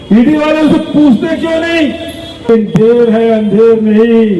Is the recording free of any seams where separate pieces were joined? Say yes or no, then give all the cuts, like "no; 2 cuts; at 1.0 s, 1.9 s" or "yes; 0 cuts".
no; 1 cut; at 2.5 s